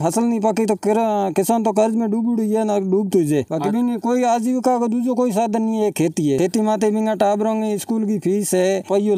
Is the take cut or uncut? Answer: uncut